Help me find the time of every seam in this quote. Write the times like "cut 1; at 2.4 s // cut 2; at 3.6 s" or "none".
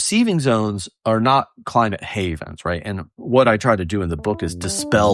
none